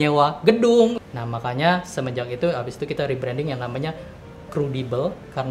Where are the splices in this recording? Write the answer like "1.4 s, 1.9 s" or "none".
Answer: 1.0 s